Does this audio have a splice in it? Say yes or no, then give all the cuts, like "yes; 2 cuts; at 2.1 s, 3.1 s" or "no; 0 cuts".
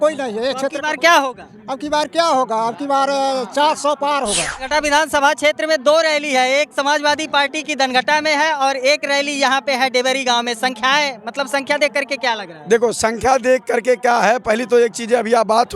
yes; 1 cut; at 4.6 s